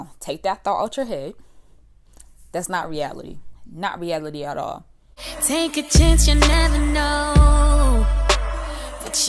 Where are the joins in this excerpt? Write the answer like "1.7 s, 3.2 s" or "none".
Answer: 4.8 s